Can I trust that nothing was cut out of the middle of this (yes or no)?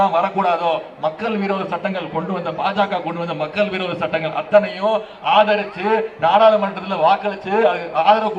yes